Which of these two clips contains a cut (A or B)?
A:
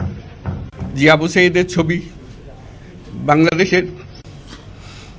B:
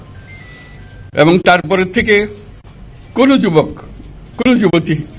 A